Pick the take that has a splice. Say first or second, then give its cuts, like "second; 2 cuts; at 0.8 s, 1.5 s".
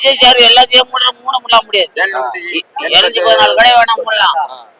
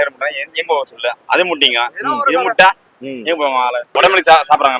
second; 1 cut; at 3.9 s